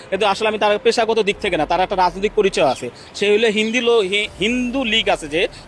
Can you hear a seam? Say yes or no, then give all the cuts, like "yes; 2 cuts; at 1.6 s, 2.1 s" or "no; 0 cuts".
no; 0 cuts